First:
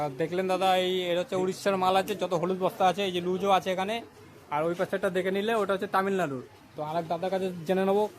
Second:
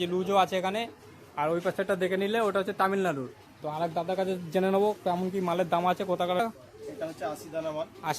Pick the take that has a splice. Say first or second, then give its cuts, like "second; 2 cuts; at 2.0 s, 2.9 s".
second; 1 cut; at 6.4 s